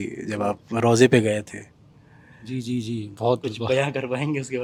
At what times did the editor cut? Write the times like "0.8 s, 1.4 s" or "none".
none